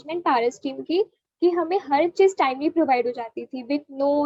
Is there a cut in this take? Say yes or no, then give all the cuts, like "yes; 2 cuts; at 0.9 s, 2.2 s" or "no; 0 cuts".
no; 0 cuts